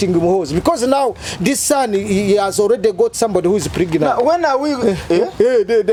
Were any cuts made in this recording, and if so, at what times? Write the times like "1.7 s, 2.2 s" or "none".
none